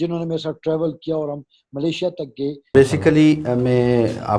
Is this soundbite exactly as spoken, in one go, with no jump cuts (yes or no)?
no